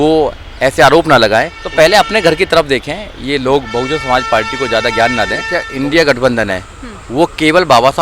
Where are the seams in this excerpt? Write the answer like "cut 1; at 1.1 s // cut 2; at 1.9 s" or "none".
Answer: cut 1; at 1.6 s // cut 2; at 5.7 s